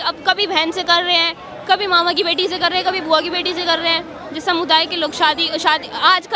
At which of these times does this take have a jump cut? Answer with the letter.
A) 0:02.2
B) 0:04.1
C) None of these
C